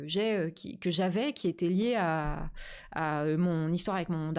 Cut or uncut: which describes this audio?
uncut